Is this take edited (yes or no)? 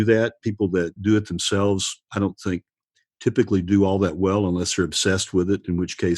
yes